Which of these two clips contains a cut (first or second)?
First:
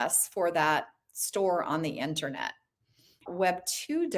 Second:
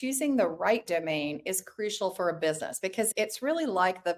first